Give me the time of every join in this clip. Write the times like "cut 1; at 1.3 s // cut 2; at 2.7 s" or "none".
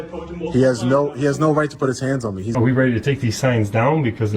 cut 1; at 2.5 s